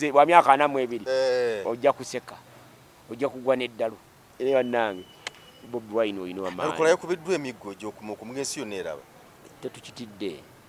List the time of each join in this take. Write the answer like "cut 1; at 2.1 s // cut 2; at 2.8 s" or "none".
cut 1; at 4.3 s